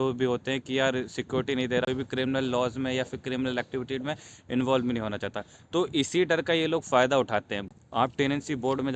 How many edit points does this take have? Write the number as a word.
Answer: two